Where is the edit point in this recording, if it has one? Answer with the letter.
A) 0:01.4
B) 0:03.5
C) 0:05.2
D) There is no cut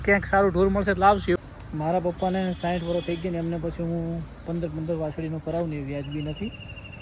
A